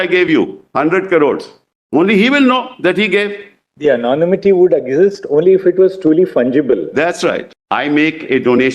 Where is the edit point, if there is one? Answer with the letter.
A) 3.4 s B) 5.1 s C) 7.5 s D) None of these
C